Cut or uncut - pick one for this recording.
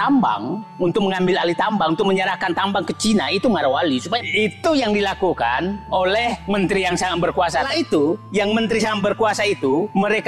cut